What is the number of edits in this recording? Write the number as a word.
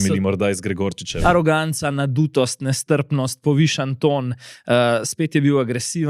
one